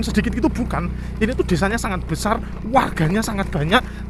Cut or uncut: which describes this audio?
uncut